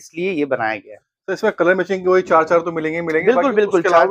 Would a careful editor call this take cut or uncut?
uncut